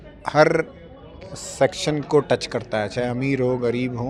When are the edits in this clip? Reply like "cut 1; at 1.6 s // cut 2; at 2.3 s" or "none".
none